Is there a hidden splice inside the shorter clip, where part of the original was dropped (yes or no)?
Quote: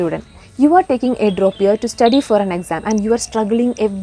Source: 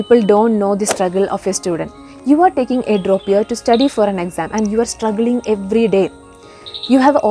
no